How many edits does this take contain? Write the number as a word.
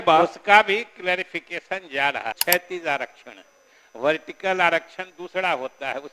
one